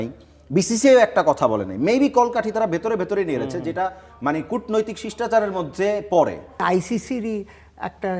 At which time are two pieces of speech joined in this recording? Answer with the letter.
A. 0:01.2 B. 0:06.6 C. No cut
B